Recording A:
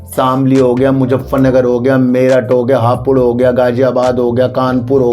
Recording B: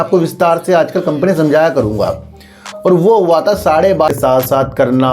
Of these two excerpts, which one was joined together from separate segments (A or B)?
B